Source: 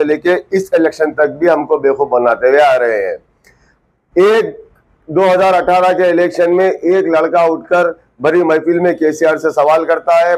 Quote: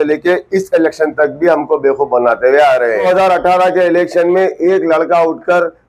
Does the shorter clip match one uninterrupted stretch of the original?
no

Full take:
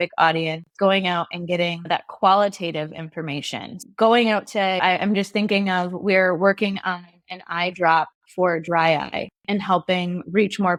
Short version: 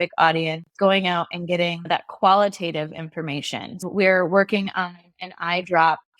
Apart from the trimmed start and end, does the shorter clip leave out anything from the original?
yes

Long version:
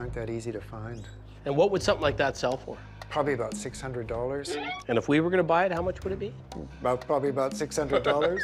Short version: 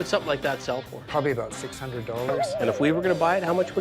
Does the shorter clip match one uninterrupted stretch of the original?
no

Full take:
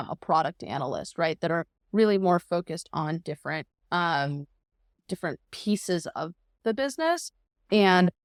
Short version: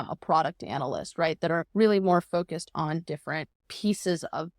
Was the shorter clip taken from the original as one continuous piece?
no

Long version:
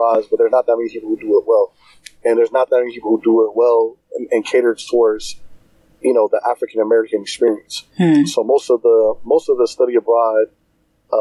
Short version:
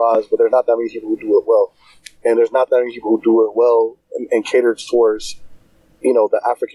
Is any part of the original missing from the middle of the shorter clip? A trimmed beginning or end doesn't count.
no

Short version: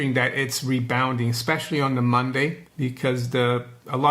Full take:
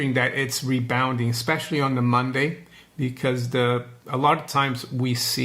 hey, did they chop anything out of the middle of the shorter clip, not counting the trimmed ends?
yes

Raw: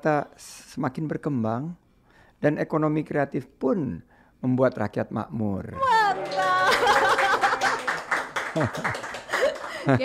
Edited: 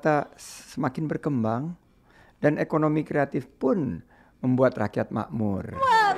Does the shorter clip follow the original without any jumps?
yes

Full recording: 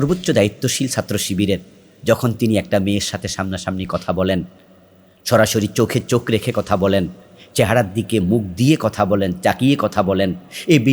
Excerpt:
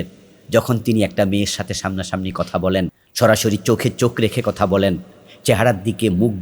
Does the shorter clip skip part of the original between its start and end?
yes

